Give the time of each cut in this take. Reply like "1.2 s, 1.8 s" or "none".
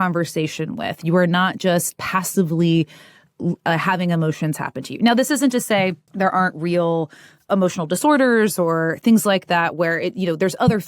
7.4 s